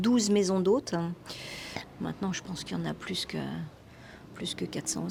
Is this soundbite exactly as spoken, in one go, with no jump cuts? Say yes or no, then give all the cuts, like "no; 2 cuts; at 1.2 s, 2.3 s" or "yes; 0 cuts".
yes; 0 cuts